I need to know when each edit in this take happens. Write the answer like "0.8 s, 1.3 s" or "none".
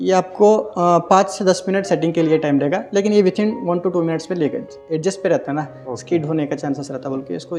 none